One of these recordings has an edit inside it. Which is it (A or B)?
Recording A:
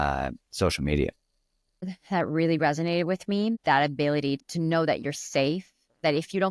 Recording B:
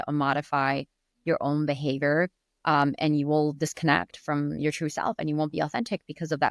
A